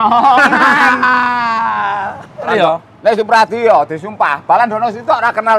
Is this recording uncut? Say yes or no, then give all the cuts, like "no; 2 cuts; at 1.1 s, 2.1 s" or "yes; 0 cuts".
no; 1 cut; at 2.5 s